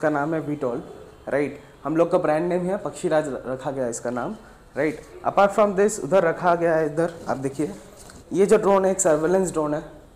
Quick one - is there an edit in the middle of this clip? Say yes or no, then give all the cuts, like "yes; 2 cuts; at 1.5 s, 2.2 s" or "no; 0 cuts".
no; 0 cuts